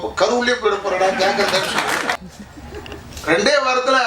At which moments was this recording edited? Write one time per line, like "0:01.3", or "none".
0:02.2